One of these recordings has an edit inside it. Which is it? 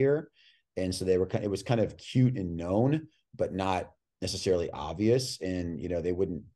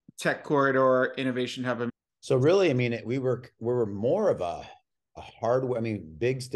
second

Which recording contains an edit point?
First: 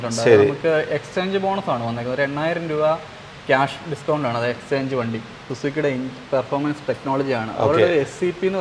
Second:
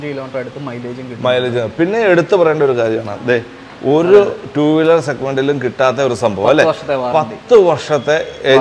first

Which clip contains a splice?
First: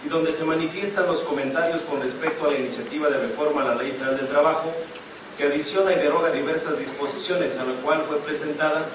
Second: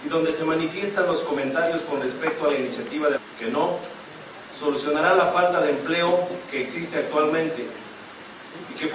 first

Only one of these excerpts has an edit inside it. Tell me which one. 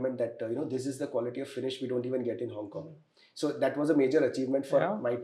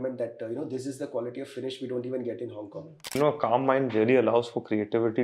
second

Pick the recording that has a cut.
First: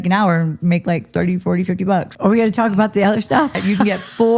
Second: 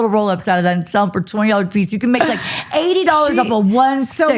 first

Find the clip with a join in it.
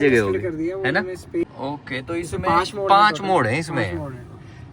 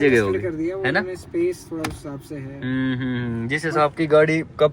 first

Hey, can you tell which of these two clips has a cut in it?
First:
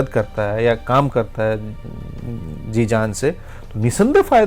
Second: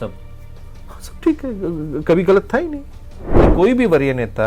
second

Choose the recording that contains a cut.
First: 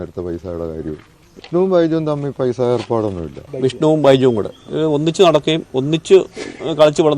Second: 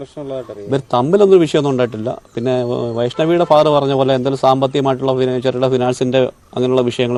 first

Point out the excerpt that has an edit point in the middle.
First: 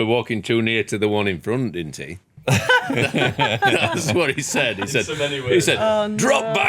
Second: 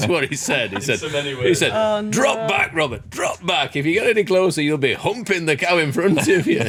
first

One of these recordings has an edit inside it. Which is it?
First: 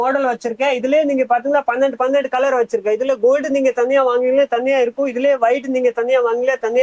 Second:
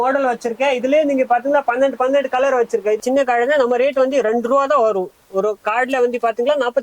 second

